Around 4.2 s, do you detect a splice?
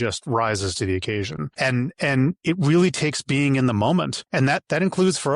yes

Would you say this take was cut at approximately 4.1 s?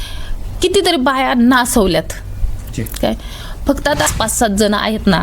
yes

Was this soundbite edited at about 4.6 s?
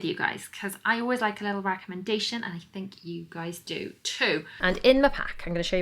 yes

